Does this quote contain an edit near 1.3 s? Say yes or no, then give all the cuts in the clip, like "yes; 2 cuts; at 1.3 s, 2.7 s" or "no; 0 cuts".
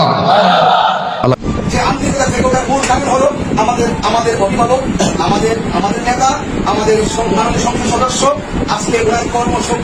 no; 0 cuts